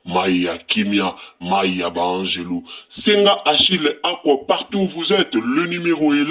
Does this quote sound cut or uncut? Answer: uncut